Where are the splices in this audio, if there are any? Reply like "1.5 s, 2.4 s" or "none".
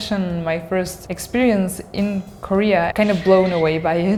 none